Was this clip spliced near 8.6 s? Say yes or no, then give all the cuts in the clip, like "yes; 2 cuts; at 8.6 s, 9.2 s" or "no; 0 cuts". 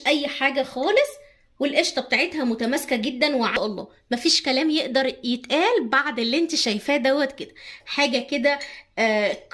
no; 1 cut; at 3.5 s